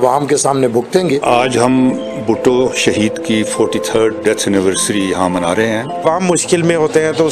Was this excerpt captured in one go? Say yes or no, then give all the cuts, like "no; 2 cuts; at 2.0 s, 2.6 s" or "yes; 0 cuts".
no; 2 cuts; at 1.2 s, 6.0 s